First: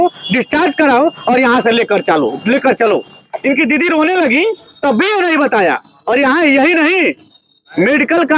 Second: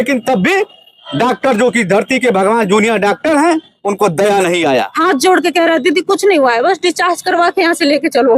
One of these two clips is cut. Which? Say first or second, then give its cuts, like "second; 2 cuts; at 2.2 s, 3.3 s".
second; 1 cut; at 4.9 s